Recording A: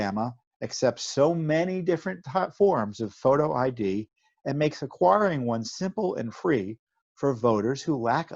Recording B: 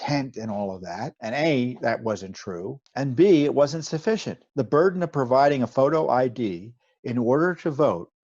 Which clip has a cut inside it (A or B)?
B